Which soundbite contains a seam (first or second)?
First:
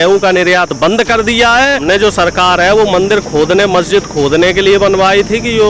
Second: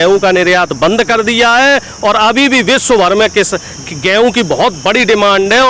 first